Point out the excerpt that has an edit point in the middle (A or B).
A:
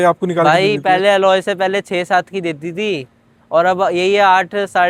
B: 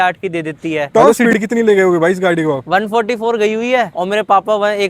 B